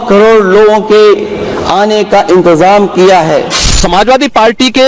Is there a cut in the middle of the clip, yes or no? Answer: yes